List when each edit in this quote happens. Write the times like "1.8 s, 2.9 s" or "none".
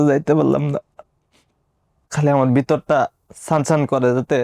2.0 s